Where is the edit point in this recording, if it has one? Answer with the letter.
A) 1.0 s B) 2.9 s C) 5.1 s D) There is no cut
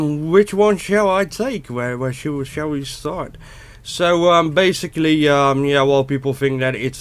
B